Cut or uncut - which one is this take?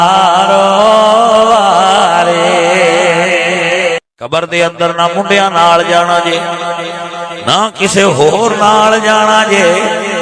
cut